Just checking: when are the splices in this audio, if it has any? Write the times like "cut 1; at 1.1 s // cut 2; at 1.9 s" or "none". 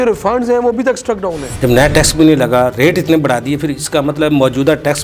cut 1; at 1.5 s